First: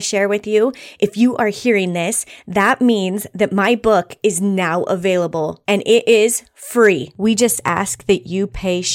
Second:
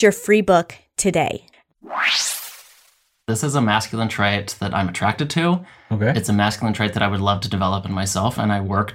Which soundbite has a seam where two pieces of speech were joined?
second; 2 cuts; at 1.5 s, 3.1 s

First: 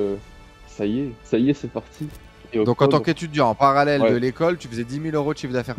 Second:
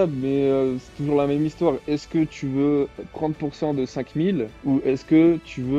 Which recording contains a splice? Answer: first; 2 cuts; at 1.2 s, 2.2 s

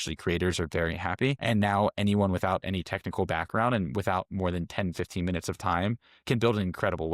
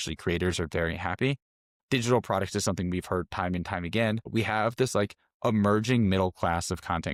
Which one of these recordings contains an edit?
first; 1 cut; at 1.4 s

